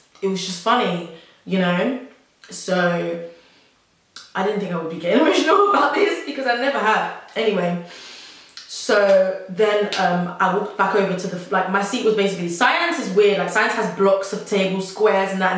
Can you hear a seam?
no; 0 cuts

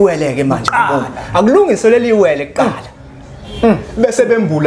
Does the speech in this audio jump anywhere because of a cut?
no; 0 cuts

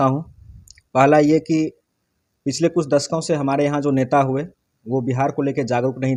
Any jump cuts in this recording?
no; 0 cuts

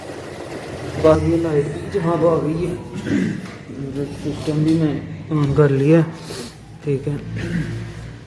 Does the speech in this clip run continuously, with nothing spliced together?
no; 1 cut; at 1.1 s

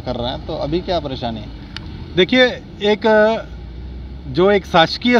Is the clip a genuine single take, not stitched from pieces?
yes; 0 cuts

